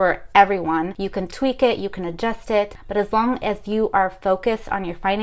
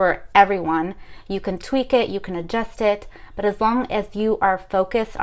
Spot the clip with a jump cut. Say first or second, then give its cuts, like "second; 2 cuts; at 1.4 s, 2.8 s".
first; 2 cuts; at 1.0 s, 2.8 s